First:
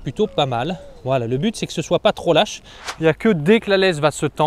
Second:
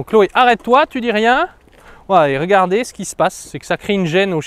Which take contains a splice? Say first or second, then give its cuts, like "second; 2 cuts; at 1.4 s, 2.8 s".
first; 1 cut; at 2.8 s